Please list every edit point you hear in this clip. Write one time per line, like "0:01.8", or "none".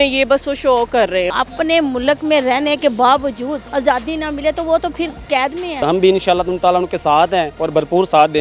0:01.3
0:03.6
0:05.8